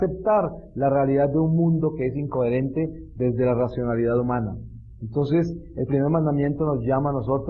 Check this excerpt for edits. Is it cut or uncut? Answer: cut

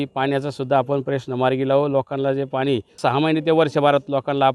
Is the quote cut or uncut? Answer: cut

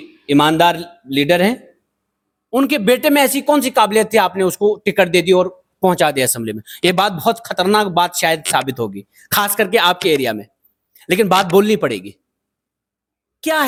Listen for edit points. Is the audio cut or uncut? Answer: uncut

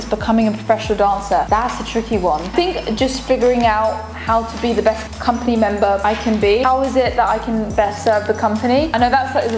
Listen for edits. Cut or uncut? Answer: uncut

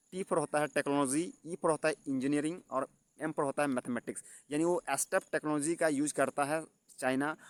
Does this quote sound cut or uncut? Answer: uncut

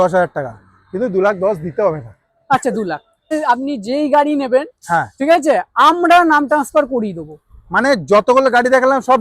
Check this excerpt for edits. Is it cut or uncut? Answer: cut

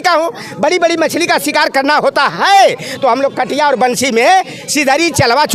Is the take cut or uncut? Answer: uncut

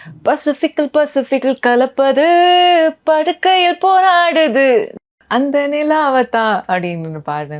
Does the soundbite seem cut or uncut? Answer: cut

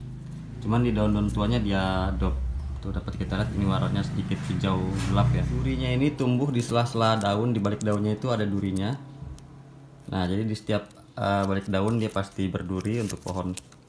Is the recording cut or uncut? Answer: cut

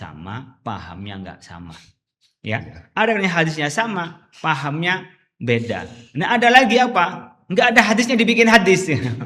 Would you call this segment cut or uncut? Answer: uncut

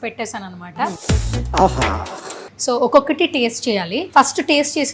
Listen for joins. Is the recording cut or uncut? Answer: cut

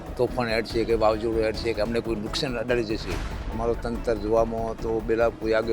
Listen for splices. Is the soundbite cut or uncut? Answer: uncut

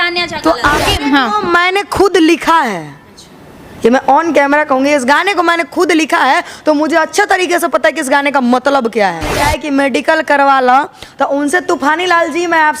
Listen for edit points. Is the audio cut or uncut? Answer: cut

